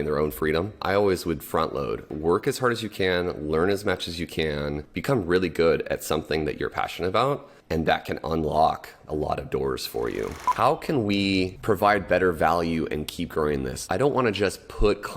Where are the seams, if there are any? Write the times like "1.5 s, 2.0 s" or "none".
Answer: 0.8 s, 2.1 s, 4.9 s, 7.5 s, 9.1 s, 10.5 s, 11.6 s, 13.8 s